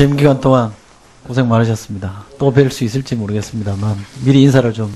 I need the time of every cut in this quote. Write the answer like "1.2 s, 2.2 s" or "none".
none